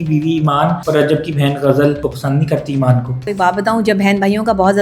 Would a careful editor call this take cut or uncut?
cut